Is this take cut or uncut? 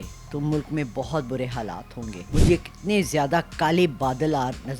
cut